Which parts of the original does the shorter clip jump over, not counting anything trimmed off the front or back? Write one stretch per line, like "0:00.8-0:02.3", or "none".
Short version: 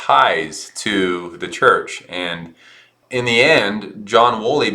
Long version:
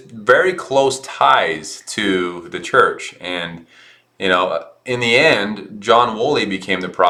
0:04.1-0:04.7